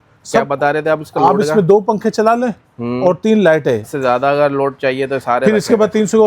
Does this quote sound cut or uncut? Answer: cut